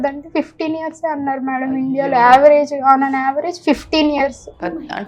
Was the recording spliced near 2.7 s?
no; 0 cuts

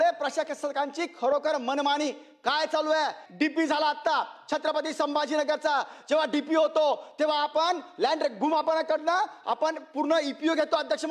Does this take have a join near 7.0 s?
no; 1 cut; at 3.2 s

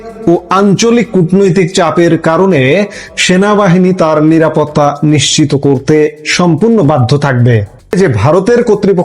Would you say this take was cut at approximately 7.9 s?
yes; 1 cut; at 7.9 s

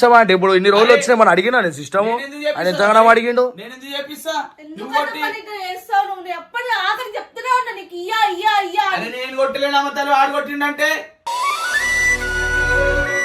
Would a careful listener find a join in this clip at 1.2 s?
no; 0 cuts

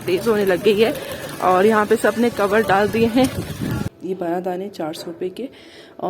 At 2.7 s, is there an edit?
no; 1 cut; at 3.9 s

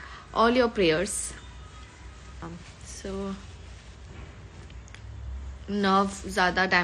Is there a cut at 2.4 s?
yes; 1 cut; at 2.4 s

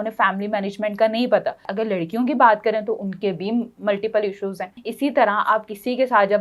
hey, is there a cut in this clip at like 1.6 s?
yes; 1 cut; at 1.6 s

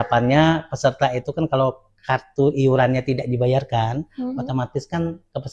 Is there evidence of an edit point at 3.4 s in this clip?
no; 0 cuts

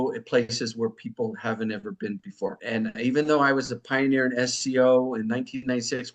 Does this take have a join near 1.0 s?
no; 1 cut; at 2.6 s

